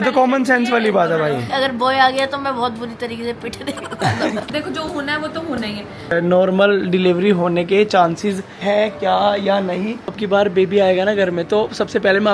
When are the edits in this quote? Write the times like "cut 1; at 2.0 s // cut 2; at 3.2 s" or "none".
cut 1; at 1.5 s // cut 2; at 4.5 s // cut 3; at 6.1 s // cut 4; at 10.2 s